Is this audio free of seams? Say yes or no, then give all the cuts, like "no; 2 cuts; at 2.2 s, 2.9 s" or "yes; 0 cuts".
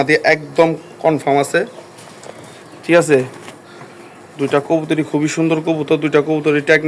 yes; 0 cuts